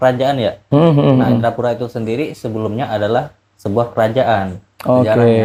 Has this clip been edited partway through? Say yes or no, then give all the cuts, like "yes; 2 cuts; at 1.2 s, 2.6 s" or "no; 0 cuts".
no; 0 cuts